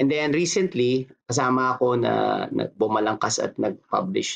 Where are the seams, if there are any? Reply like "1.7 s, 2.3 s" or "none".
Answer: 1.2 s